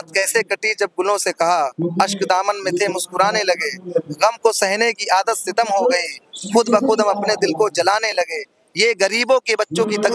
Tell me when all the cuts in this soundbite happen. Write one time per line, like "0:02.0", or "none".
none